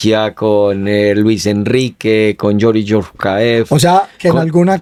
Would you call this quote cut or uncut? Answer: uncut